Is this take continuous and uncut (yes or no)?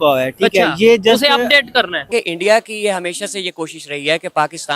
no